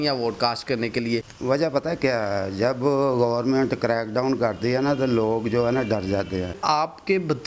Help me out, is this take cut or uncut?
cut